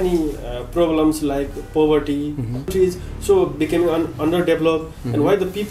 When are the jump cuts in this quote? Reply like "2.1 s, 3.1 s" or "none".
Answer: 2.7 s